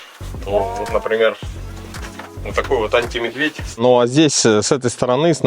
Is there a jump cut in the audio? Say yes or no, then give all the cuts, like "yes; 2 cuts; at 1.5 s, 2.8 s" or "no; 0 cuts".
yes; 1 cut; at 3.7 s